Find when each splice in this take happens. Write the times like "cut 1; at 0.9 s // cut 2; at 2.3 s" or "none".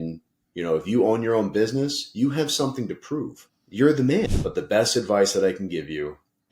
cut 1; at 4.4 s